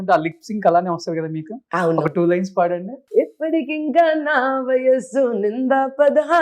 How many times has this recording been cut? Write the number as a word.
one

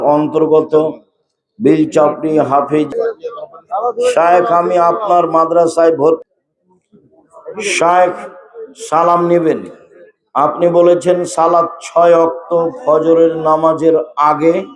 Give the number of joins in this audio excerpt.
two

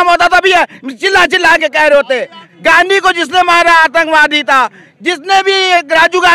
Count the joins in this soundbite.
one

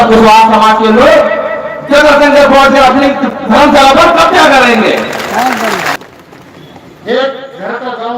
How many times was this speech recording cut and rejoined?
one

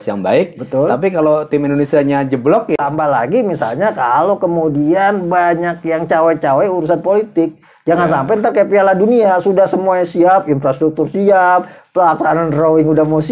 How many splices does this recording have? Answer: one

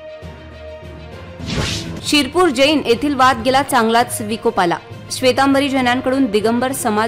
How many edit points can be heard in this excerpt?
zero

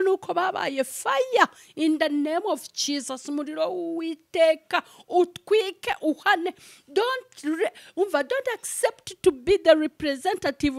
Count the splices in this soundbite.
zero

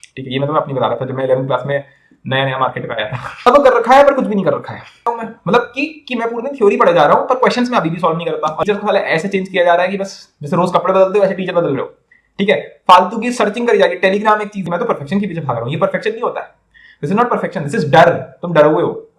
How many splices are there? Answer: four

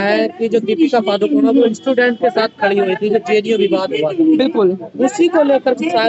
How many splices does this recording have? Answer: zero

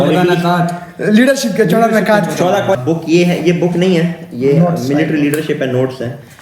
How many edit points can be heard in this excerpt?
one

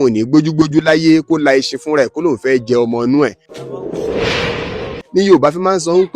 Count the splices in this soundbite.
two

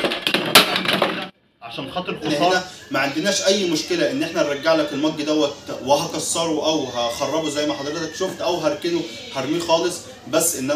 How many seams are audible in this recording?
one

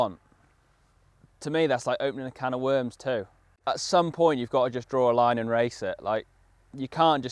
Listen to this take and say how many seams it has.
zero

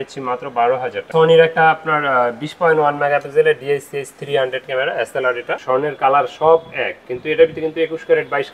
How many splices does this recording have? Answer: two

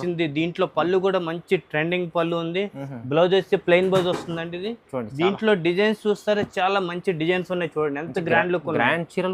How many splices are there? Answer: zero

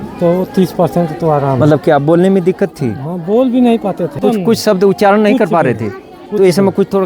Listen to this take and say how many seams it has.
one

